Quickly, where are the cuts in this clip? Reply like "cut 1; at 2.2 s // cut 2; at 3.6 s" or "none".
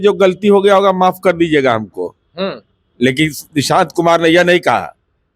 none